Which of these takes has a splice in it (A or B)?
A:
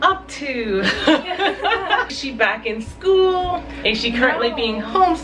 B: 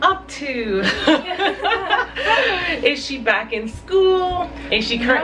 A